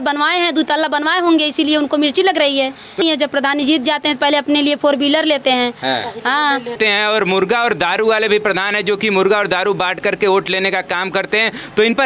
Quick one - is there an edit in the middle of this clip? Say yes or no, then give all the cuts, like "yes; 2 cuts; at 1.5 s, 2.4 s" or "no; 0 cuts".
yes; 2 cuts; at 3.0 s, 6.8 s